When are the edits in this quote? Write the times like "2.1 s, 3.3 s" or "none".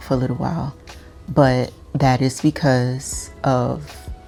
none